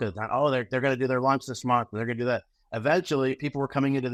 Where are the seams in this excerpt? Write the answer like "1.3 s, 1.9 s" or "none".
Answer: none